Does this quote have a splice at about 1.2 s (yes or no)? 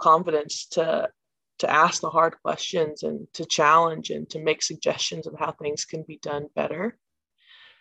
no